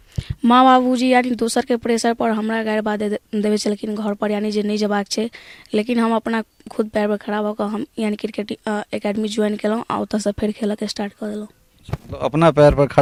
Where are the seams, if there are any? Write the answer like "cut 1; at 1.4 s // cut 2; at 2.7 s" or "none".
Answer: none